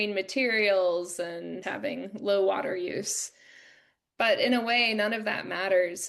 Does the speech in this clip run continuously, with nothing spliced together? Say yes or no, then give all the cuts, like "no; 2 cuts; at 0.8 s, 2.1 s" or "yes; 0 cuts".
no; 1 cut; at 1.6 s